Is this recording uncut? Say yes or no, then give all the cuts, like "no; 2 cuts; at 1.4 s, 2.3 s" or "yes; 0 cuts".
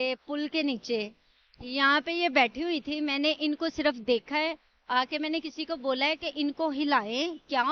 yes; 0 cuts